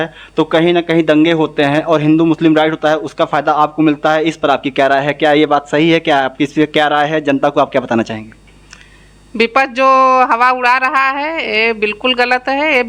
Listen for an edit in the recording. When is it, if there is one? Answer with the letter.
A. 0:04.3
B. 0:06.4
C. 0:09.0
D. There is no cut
D